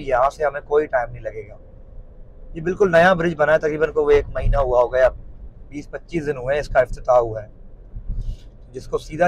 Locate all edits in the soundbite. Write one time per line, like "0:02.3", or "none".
none